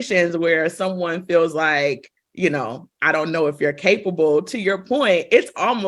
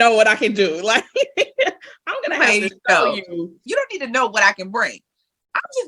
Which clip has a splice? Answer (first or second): second